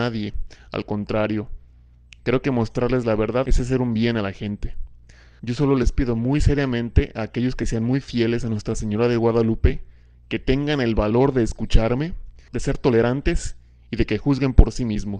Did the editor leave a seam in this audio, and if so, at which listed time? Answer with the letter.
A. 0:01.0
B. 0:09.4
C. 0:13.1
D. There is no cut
A